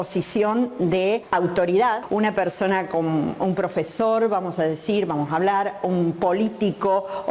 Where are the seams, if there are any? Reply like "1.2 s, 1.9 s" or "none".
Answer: 1.2 s, 2.0 s